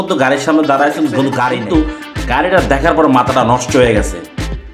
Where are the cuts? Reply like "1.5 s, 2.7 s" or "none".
1.6 s